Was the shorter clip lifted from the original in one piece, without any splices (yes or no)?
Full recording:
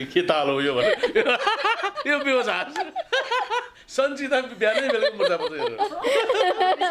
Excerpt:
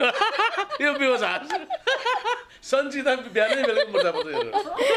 yes